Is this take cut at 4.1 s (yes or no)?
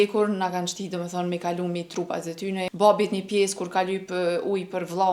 no